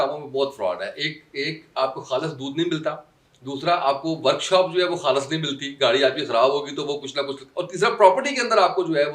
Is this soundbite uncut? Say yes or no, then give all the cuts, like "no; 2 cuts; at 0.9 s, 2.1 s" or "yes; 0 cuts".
yes; 0 cuts